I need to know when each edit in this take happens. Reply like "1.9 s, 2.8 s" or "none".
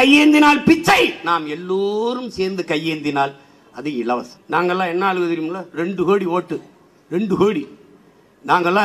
4.3 s